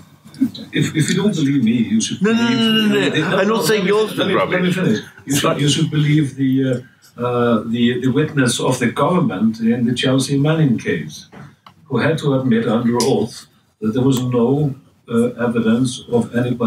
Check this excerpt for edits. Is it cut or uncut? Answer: uncut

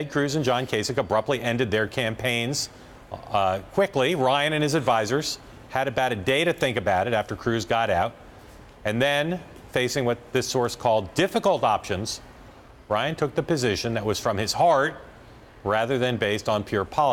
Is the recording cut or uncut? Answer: uncut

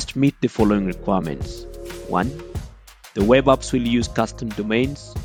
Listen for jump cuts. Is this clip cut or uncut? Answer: uncut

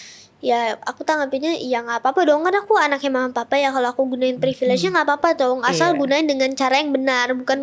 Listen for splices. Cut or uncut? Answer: uncut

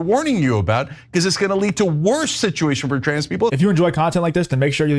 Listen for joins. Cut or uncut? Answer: cut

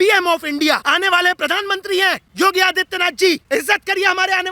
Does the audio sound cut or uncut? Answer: cut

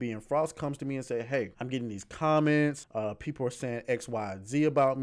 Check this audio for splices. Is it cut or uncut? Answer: cut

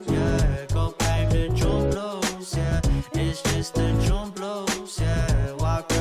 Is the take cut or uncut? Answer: cut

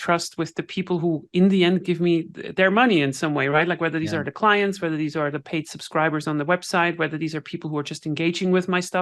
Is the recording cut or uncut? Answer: uncut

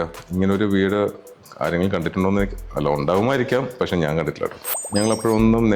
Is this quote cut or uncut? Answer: cut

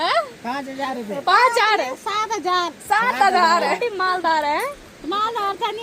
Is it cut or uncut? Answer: cut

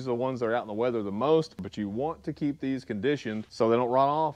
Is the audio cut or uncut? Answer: cut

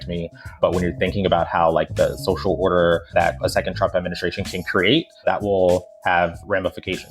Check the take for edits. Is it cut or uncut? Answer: uncut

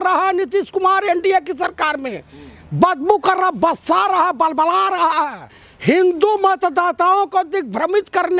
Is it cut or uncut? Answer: cut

